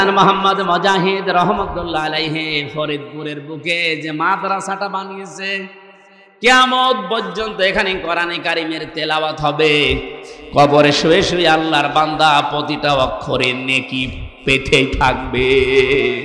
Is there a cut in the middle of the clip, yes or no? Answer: no